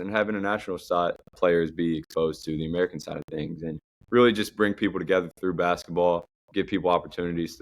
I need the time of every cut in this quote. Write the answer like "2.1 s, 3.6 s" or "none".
1.3 s, 3.9 s, 6.4 s